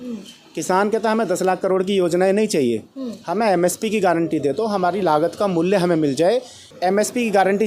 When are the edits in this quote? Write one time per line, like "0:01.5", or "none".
0:06.6